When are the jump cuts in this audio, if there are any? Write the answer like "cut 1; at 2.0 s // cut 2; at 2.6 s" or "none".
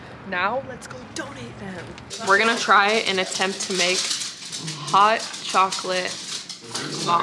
cut 1; at 2.1 s